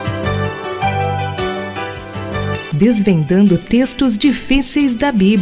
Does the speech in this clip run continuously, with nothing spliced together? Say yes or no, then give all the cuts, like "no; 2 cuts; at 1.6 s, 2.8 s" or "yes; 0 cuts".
yes; 0 cuts